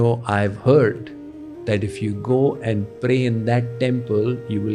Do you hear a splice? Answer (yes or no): no